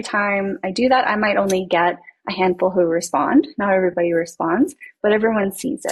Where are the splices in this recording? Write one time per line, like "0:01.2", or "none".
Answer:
none